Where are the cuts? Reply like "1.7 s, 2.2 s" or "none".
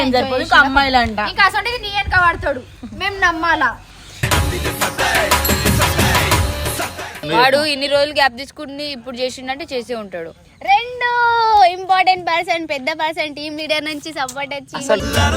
7.2 s